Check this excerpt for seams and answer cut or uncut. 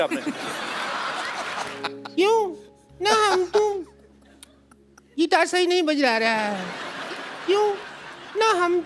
cut